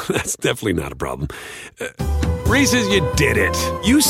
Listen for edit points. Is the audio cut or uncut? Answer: uncut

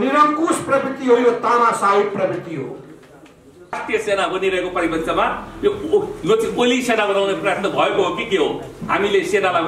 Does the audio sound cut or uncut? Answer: cut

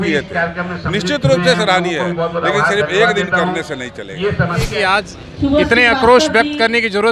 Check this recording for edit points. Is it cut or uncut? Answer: cut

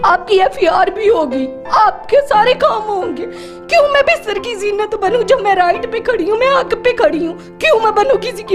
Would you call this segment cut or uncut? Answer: uncut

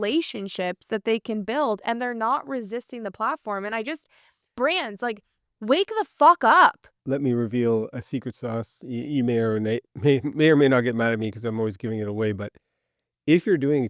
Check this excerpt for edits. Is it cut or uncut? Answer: uncut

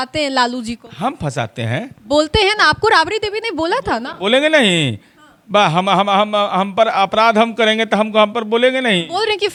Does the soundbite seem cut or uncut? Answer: uncut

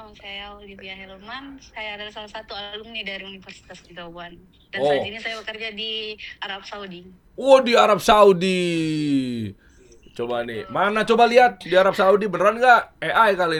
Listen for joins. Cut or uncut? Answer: uncut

